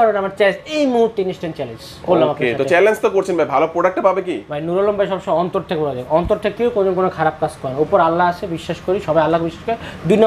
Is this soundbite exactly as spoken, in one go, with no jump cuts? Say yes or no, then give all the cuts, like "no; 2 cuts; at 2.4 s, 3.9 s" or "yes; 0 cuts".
yes; 0 cuts